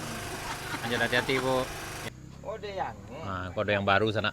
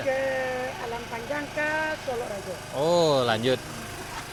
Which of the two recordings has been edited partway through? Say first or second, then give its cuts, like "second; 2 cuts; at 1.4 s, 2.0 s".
first; 1 cut; at 2.1 s